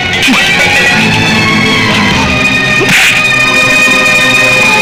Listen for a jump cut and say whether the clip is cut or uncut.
uncut